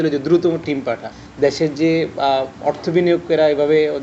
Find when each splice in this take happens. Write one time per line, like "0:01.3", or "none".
0:01.0